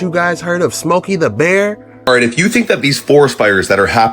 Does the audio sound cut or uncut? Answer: cut